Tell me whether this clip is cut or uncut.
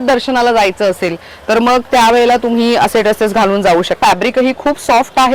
cut